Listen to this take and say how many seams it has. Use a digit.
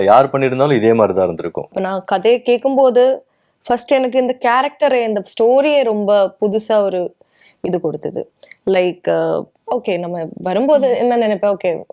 2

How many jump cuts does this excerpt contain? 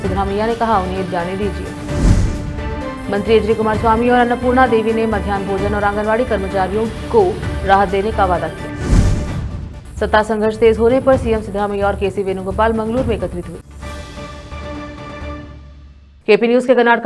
0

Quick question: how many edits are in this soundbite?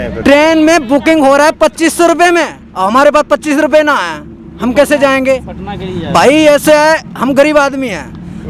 0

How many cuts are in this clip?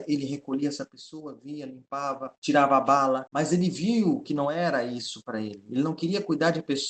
2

